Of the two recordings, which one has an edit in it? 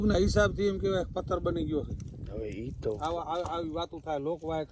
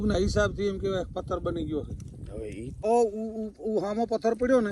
second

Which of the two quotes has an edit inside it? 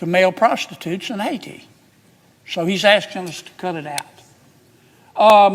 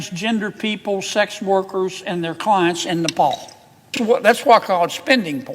second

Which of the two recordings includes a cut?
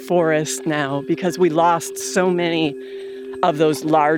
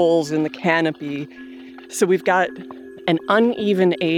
second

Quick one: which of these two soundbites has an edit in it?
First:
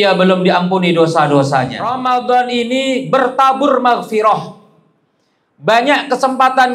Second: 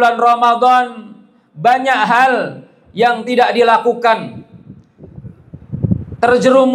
first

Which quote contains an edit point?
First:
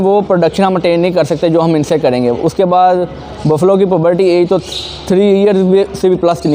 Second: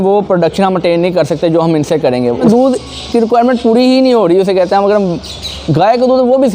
second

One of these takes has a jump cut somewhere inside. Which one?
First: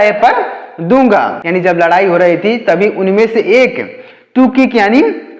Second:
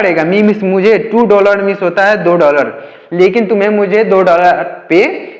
first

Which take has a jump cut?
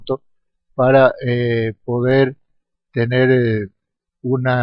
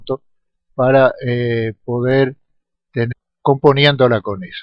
first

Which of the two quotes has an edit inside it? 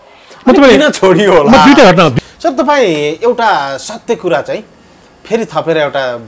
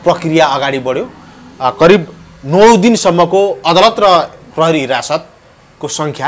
first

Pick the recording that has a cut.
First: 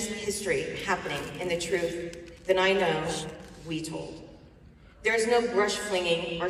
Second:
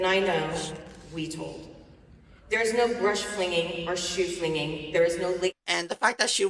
second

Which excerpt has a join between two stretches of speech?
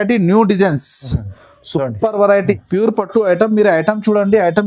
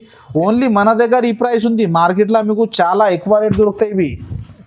first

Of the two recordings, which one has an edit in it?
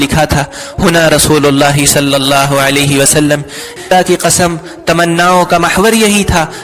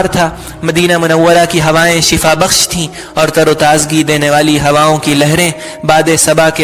first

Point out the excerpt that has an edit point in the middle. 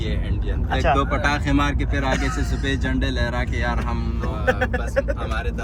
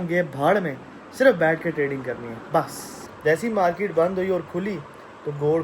second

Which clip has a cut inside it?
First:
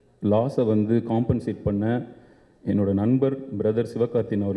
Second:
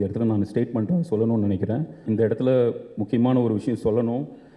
second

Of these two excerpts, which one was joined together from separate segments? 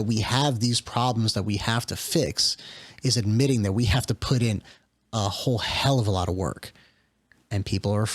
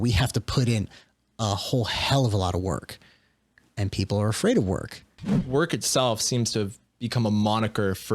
second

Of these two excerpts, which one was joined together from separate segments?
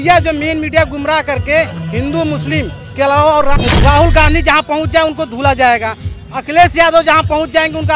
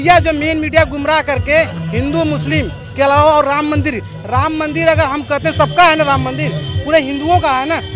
first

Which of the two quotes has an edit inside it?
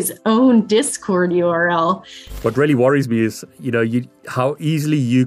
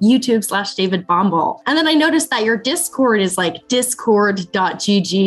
first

